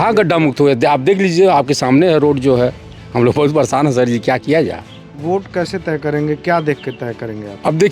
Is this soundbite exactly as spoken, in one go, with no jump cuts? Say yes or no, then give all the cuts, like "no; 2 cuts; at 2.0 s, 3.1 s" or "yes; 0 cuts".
no; 1 cut; at 5.1 s